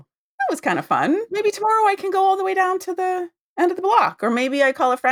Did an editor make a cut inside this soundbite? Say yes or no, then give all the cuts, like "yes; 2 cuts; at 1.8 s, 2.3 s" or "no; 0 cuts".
yes; 1 cut; at 1.3 s